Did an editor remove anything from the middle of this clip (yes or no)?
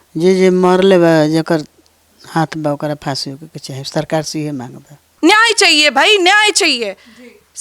yes